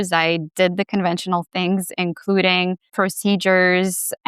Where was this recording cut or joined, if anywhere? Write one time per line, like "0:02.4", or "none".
0:02.8